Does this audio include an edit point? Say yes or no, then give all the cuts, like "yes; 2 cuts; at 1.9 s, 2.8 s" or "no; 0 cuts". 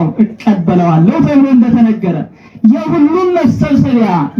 no; 0 cuts